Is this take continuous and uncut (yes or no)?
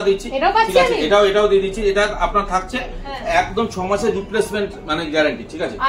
yes